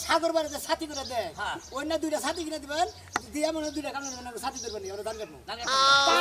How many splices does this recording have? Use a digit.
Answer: 0